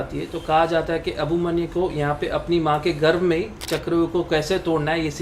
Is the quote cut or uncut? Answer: uncut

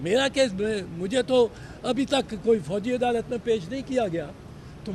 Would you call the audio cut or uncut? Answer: uncut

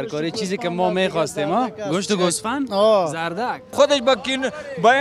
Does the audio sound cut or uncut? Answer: cut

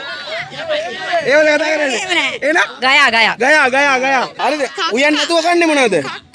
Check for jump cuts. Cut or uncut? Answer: cut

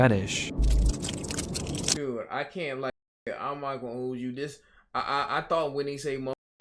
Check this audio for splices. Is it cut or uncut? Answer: uncut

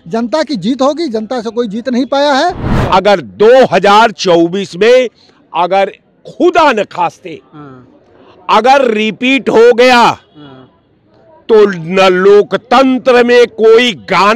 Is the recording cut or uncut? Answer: cut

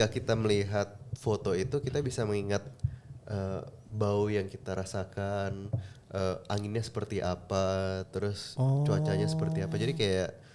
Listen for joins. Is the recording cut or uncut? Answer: uncut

